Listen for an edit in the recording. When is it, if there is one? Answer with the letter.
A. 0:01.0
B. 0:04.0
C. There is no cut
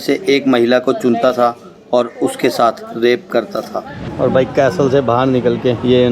B